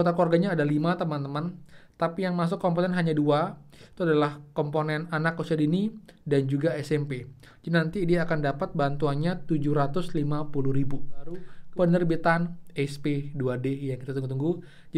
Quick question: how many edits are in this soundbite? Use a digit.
1